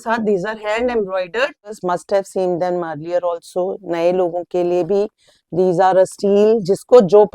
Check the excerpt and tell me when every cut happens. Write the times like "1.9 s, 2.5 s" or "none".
1.8 s